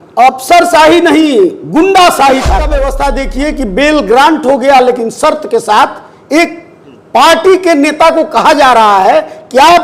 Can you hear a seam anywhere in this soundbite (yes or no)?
yes